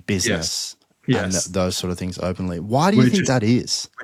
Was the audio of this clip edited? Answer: no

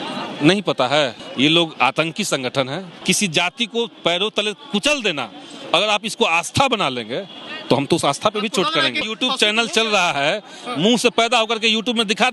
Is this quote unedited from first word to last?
no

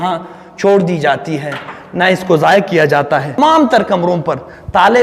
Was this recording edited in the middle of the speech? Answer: yes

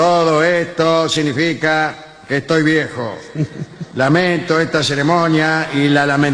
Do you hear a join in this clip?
no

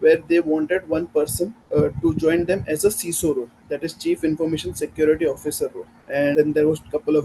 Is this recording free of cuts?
no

